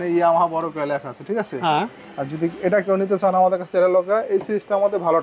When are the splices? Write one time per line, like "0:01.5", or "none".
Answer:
none